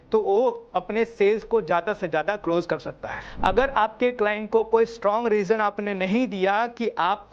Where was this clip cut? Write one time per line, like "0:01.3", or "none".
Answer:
0:03.2